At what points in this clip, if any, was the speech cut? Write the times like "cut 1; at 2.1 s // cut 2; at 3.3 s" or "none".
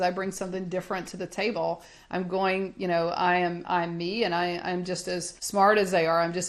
cut 1; at 5.3 s